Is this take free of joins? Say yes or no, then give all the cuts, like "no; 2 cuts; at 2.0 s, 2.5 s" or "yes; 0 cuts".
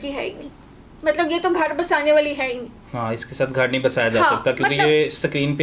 yes; 0 cuts